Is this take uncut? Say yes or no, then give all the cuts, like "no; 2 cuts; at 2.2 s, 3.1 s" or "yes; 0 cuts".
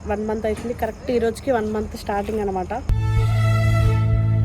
yes; 0 cuts